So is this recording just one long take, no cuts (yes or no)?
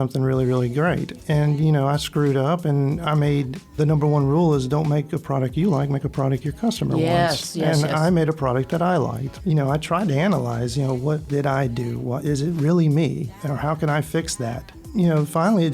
no